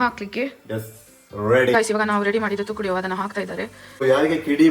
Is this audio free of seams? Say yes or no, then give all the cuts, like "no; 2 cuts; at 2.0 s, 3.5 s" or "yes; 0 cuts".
no; 1 cut; at 3.8 s